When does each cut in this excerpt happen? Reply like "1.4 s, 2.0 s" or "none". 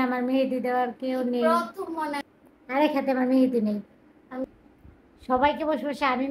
2.3 s, 4.5 s